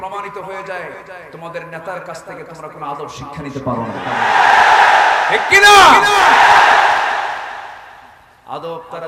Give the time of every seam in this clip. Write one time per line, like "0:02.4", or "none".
none